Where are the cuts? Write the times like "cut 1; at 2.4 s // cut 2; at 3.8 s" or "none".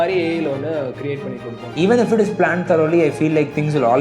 cut 1; at 1.6 s